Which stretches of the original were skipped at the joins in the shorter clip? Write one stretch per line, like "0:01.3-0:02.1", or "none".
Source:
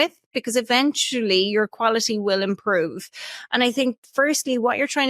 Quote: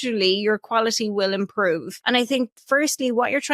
0:03.0-0:03.4